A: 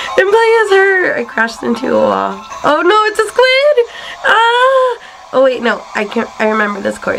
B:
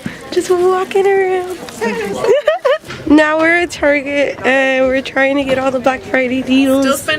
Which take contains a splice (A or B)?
B